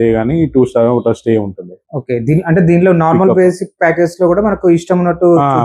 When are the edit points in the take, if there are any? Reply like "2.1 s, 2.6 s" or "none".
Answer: none